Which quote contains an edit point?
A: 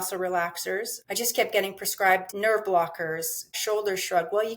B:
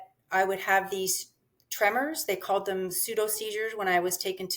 A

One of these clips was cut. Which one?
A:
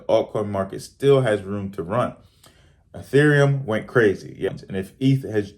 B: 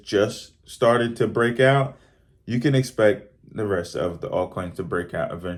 A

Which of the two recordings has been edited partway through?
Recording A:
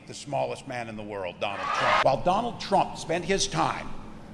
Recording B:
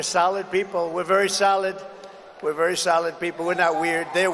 A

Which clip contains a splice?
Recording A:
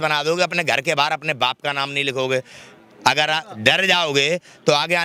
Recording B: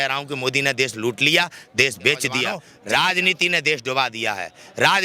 B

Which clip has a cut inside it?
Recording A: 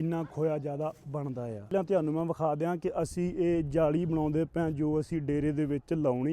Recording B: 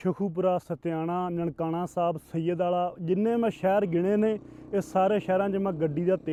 A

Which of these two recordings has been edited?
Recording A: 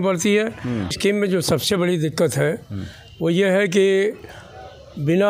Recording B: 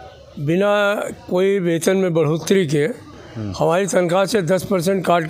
A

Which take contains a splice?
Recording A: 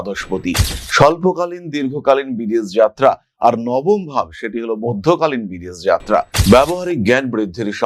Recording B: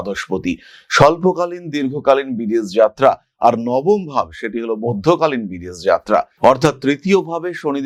A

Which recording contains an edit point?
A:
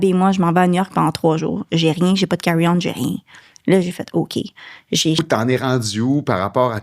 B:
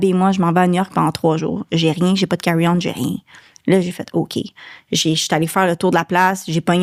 A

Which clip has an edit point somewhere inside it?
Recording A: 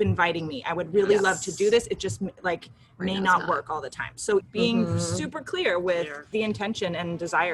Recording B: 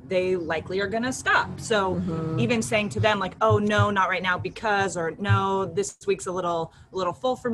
A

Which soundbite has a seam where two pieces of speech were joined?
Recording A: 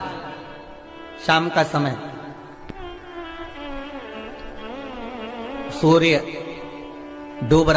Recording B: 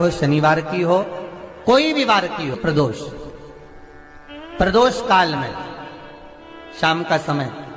B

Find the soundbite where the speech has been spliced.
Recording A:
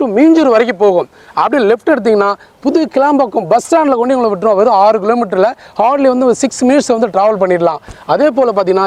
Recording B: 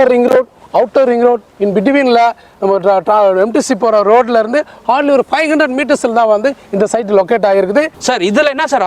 B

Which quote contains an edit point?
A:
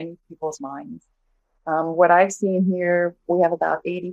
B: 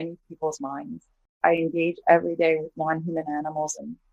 B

